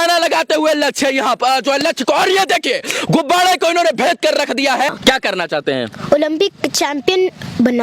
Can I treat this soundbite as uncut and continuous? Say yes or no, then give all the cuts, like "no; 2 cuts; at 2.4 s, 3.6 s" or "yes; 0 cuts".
no; 1 cut; at 4.9 s